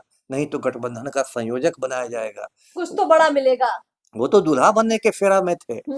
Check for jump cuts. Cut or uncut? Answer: uncut